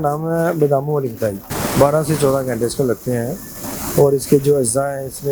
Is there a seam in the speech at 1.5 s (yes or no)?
yes